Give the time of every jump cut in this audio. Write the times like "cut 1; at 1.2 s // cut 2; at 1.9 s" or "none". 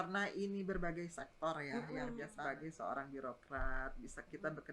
cut 1; at 2.3 s